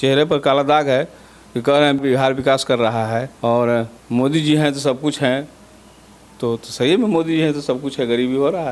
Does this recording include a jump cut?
yes; 3 cuts; at 2.0 s, 3.3 s, 4.0 s

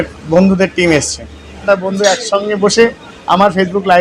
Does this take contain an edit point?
yes; 1 cut; at 1.6 s

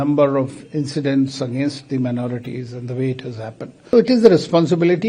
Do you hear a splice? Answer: yes; 1 cut; at 3.9 s

